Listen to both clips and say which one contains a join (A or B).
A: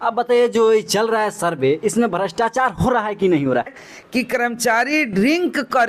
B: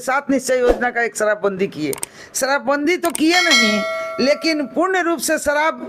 A